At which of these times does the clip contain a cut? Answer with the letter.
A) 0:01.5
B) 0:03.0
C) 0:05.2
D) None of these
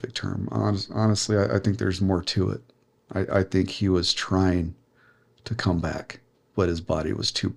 D